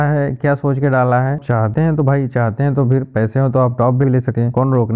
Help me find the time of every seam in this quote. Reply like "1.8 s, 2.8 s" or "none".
1.4 s